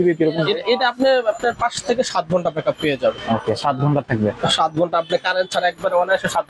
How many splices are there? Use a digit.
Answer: 0